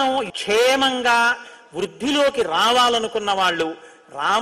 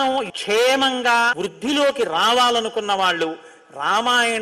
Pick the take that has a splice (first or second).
second